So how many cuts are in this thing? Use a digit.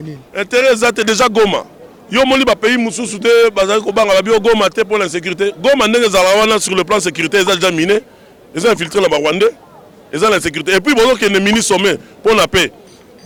0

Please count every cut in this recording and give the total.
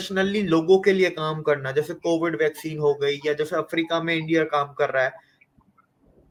0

